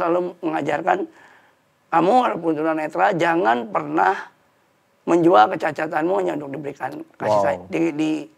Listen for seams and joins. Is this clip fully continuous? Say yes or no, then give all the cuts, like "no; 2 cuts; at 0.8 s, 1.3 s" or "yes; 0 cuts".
yes; 0 cuts